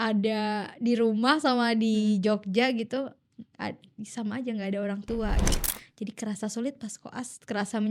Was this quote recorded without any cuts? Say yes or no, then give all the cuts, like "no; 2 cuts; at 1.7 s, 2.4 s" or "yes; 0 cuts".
no; 1 cut; at 5.5 s